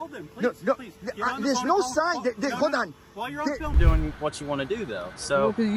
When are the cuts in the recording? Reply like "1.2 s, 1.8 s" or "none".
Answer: 3.7 s

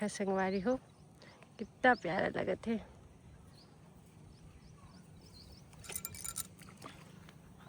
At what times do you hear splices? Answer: none

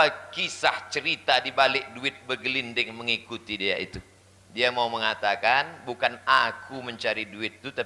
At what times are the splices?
none

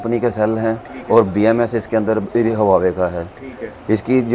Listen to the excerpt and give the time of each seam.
none

